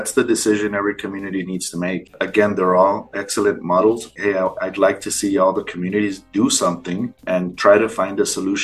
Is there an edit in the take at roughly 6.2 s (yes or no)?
no